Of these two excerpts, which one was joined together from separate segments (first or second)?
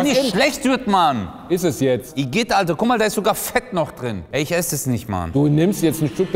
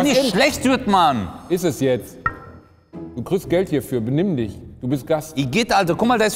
first